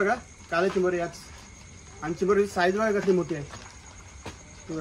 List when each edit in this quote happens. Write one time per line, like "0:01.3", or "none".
none